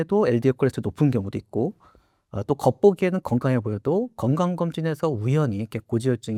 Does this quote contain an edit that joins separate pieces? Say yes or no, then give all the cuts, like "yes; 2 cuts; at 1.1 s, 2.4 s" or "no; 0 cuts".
no; 0 cuts